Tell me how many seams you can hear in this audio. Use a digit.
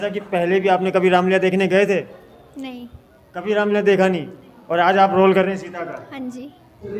0